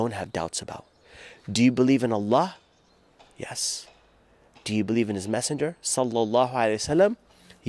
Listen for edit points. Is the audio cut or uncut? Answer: uncut